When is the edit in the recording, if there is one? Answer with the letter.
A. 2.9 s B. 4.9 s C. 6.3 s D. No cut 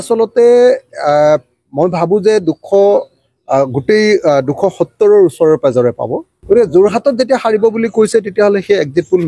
C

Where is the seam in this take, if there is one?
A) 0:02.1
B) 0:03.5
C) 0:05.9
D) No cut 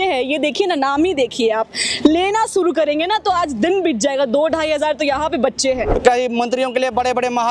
C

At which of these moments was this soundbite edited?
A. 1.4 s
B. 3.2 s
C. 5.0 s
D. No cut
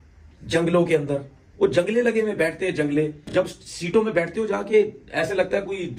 D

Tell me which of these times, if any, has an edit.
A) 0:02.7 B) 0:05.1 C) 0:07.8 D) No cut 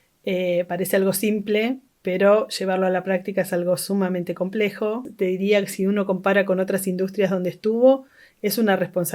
B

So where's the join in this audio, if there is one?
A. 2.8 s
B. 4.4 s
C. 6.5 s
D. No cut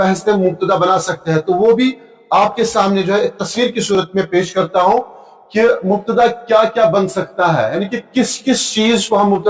D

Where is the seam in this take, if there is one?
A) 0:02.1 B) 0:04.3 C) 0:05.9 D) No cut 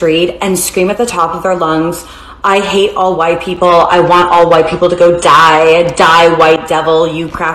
B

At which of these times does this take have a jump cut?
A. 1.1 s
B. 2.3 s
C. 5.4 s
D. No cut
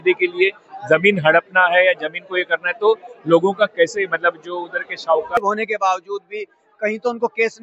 C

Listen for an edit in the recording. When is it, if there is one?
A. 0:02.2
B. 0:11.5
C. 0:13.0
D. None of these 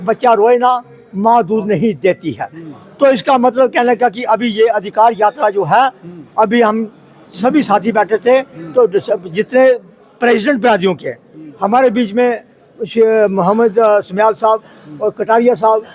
D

